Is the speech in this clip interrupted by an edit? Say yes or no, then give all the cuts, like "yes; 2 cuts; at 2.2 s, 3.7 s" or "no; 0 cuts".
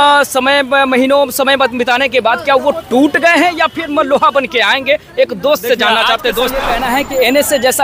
yes; 1 cut; at 6.7 s